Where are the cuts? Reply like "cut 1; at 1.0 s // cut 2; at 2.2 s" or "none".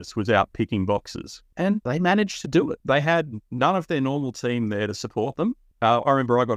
cut 1; at 1.7 s // cut 2; at 2.8 s